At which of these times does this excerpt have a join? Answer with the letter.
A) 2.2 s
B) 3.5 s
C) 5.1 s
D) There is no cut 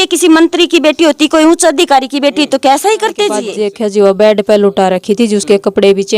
B